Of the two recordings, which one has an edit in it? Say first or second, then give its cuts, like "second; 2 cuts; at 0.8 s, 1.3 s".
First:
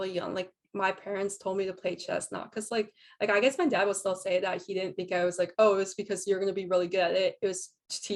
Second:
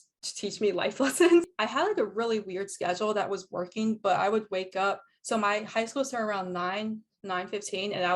second; 1 cut; at 1.6 s